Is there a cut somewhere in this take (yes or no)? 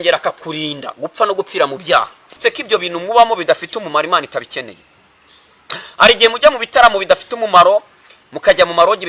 yes